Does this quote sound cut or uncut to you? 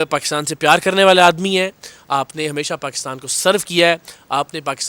uncut